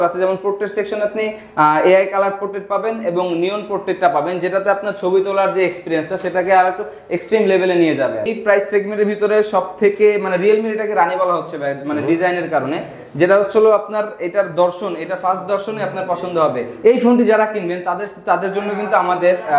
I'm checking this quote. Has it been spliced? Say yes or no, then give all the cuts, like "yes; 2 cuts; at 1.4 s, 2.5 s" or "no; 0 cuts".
yes; 2 cuts; at 8.3 s, 16.8 s